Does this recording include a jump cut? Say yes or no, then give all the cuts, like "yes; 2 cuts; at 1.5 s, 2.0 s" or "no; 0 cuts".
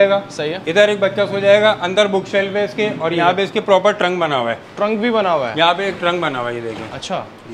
no; 0 cuts